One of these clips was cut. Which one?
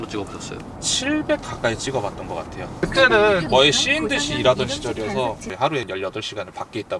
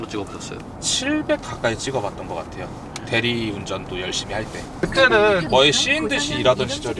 first; 2 cuts; at 2.7 s, 5.4 s

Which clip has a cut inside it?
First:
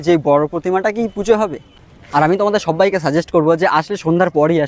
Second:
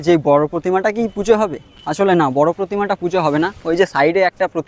first; 1 cut; at 1.8 s

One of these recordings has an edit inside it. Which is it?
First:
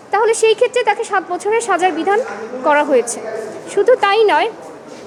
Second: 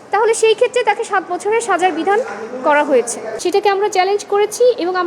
second; 1 cut; at 3.2 s

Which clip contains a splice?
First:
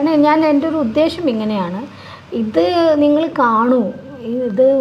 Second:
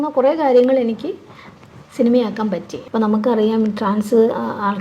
second; 1 cut; at 2.7 s

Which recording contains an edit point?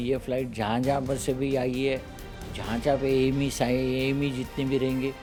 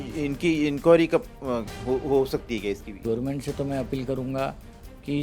second; 1 cut; at 3.0 s

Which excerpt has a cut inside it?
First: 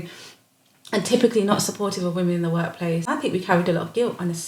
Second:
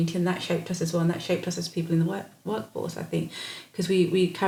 first; 1 cut; at 3.0 s

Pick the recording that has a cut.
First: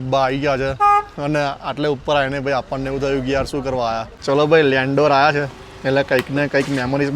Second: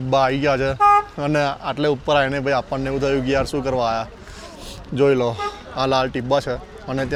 first; 1 cut; at 4.1 s

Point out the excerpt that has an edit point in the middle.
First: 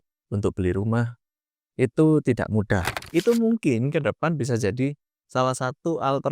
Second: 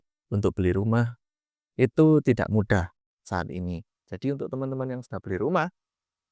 first; 1 cut; at 3.0 s

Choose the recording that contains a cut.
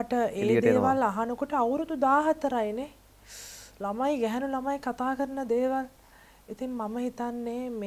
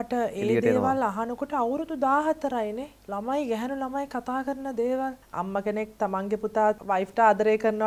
second; 3 cuts; at 2.9 s, 5.8 s, 6.8 s

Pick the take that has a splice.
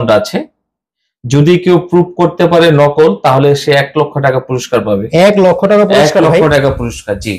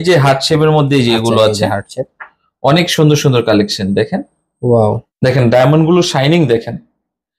second; 1 cut; at 4.9 s

